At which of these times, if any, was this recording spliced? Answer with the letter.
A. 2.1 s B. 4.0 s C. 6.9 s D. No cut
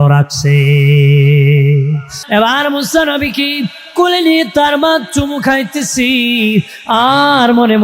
A